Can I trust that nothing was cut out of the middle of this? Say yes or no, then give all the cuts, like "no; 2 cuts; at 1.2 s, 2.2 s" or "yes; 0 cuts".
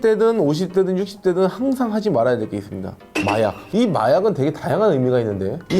no; 1 cut; at 3.7 s